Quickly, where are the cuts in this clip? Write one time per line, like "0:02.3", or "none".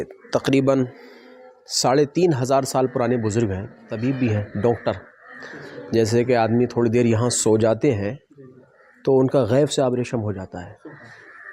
0:03.8